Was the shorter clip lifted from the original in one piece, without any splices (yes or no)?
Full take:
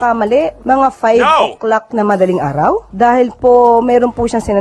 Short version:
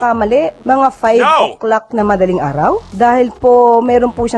yes